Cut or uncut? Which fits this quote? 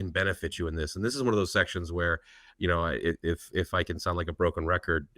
uncut